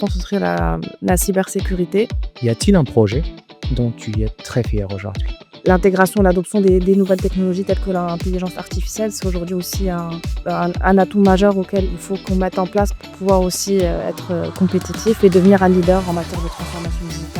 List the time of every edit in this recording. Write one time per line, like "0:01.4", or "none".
0:02.2
0:05.2